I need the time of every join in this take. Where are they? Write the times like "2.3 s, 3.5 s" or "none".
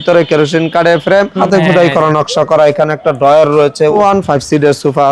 1.4 s, 3.9 s